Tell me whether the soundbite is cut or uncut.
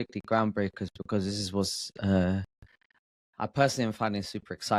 uncut